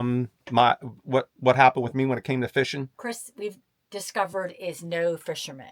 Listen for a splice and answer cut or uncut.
uncut